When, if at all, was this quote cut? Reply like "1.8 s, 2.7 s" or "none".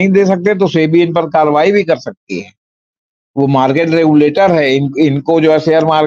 none

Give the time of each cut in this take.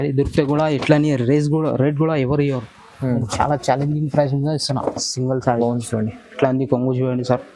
5.6 s

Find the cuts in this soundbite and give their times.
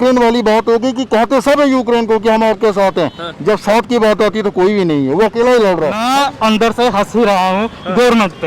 6.0 s

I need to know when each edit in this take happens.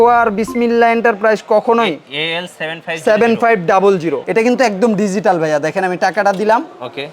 4.2 s

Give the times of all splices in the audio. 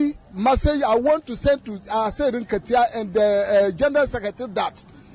none

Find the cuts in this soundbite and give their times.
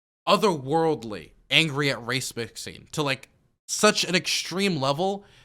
none

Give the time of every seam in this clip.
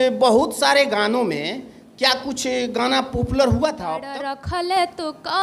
4.3 s

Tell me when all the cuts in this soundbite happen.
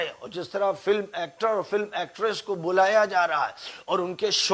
none

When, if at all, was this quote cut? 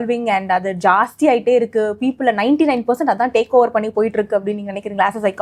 none

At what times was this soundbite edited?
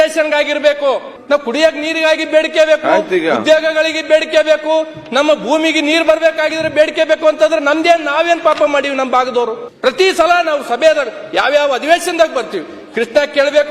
1.1 s, 9.7 s

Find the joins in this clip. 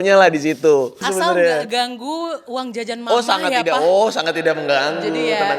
1.0 s

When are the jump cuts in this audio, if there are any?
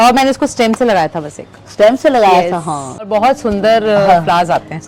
3.1 s

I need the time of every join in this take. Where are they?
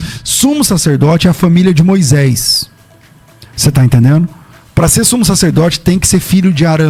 none

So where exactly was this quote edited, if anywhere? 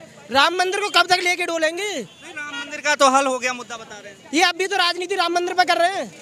none

